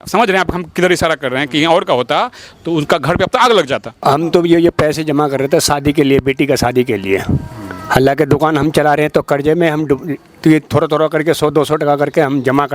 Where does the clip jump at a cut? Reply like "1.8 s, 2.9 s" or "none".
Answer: 4.0 s